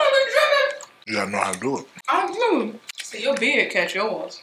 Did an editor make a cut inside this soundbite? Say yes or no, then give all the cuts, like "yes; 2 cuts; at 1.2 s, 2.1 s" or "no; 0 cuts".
yes; 3 cuts; at 0.9 s, 1.9 s, 3.2 s